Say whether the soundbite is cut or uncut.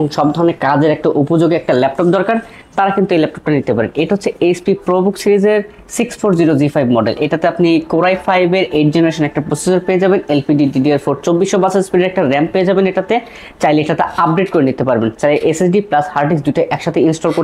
uncut